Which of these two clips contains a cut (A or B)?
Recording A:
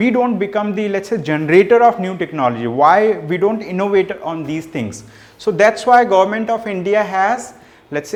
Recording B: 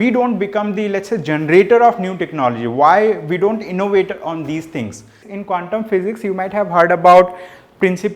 B